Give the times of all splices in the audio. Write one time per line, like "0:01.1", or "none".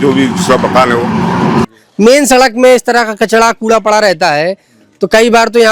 0:01.7